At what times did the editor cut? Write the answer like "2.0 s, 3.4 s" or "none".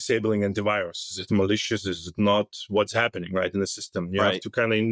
none